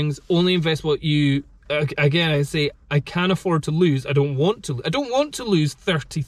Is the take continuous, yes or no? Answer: yes